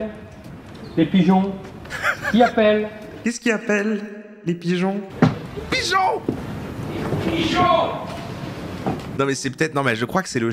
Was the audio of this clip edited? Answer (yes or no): yes